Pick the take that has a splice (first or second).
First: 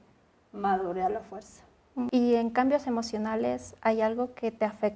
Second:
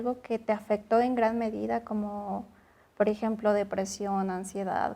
first